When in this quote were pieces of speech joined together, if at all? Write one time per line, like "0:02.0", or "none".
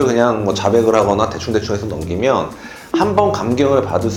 none

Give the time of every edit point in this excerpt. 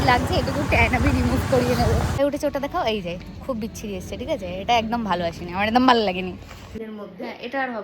0:02.2
0:06.8

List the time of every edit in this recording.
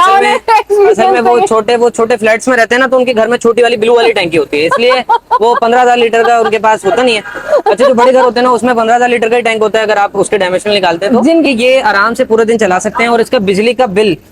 0:11.4

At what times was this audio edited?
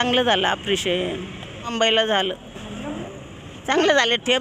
0:01.7
0:03.0

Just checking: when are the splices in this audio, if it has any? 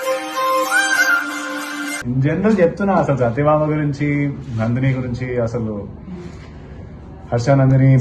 0:02.0

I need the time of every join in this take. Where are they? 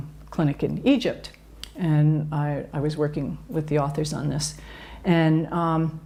none

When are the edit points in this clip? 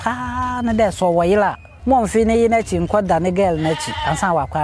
0:01.7

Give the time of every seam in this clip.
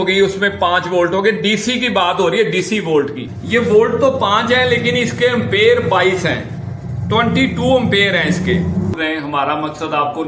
0:03.3
0:08.9

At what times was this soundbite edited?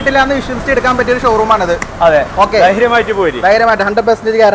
none

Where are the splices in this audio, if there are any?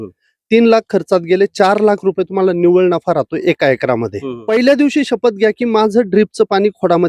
0:04.3

